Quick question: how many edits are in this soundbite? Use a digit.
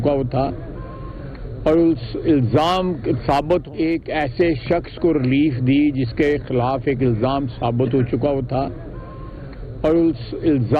0